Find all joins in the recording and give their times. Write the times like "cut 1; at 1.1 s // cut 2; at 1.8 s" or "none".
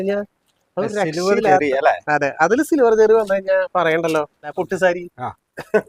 cut 1; at 4.5 s